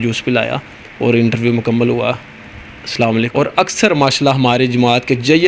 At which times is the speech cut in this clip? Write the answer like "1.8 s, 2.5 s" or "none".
none